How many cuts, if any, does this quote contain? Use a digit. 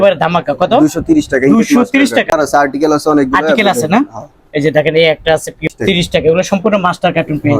2